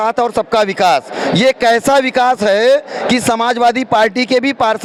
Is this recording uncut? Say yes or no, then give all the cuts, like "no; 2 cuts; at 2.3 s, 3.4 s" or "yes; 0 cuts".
yes; 0 cuts